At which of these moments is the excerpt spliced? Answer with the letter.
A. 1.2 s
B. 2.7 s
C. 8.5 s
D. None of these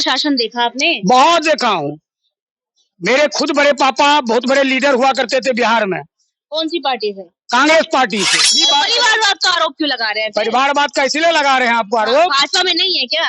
C